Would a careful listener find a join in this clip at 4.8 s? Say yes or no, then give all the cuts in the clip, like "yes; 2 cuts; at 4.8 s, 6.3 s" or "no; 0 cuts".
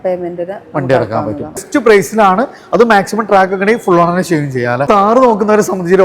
yes; 2 cuts; at 1.6 s, 4.8 s